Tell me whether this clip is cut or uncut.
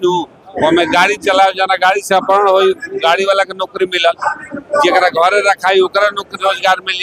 uncut